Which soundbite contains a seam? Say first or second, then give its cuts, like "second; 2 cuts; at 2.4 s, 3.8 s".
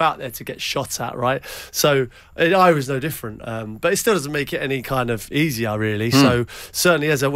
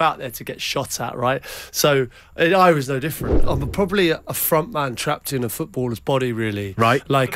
second; 1 cut; at 3.4 s